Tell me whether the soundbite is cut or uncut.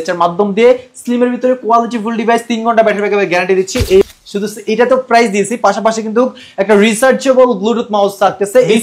cut